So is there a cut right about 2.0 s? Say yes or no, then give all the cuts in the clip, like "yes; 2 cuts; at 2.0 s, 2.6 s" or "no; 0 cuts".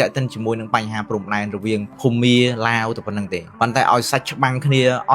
yes; 2 cuts; at 2.0 s, 3.4 s